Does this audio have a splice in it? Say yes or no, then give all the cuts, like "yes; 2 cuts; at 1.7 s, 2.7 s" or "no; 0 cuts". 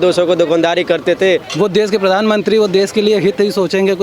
yes; 1 cut; at 1.5 s